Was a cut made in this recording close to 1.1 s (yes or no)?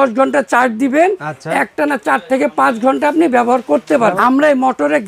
no